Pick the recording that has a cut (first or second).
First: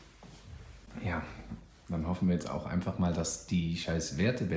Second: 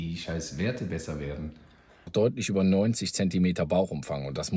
second